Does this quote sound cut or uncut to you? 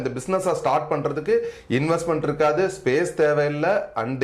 uncut